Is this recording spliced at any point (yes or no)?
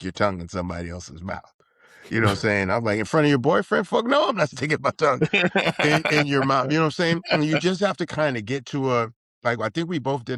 no